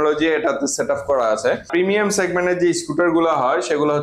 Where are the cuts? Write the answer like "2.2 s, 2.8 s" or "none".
1.7 s